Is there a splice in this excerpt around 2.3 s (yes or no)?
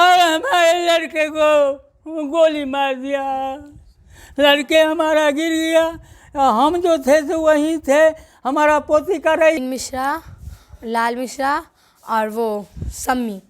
no